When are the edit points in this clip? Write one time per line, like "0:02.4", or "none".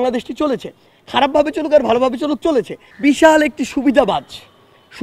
0:02.8